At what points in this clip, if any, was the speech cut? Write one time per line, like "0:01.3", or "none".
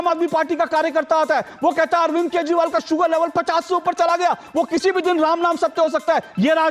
none